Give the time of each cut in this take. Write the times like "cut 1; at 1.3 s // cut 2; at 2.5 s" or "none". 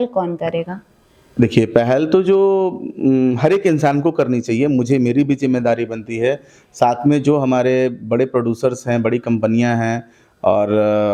none